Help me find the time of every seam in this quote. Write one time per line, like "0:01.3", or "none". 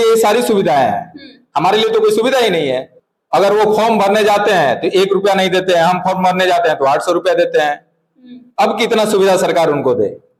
0:02.9